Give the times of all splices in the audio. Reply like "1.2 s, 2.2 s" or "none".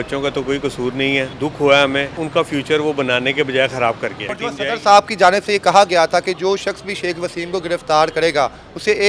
1.3 s, 2.2 s, 4.3 s